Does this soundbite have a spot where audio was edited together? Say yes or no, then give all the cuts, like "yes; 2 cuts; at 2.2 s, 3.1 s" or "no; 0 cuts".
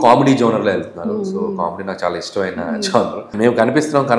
yes; 1 cut; at 3.3 s